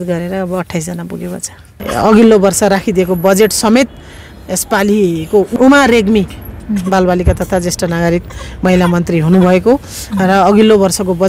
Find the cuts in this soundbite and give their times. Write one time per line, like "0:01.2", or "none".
0:01.8
0:05.5
0:06.4